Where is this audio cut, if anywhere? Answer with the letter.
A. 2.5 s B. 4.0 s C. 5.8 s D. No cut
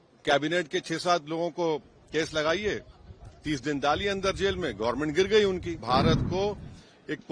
C